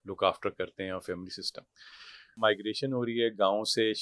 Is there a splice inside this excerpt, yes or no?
yes